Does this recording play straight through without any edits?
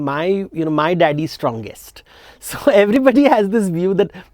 yes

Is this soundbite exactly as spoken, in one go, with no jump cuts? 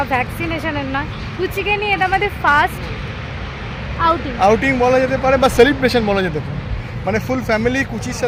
yes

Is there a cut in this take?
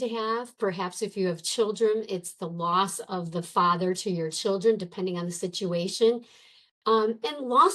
no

